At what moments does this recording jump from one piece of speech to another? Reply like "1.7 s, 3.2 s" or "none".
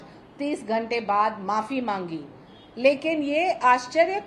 none